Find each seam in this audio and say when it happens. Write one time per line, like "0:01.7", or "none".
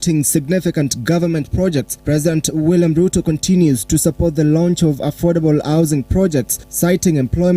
0:06.6